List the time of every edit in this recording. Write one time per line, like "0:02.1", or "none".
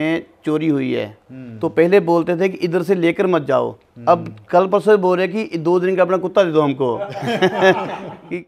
none